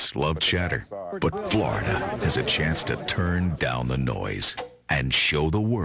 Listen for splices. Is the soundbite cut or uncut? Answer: cut